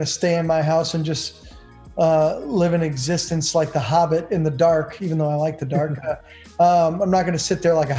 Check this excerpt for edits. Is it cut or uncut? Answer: uncut